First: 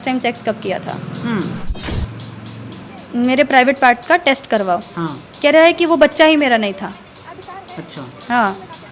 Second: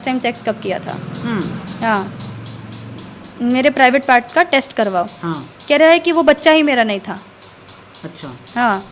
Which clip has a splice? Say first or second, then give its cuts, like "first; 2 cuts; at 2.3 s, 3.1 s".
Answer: first; 1 cut; at 1.8 s